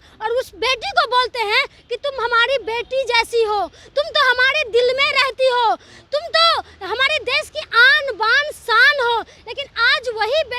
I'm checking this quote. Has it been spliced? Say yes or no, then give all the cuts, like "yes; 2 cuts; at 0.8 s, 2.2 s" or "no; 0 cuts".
no; 0 cuts